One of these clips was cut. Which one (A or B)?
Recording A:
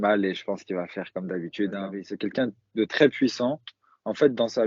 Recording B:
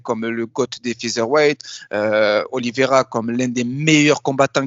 A